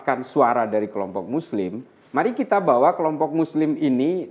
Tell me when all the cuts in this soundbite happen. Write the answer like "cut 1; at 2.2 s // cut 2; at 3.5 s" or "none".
none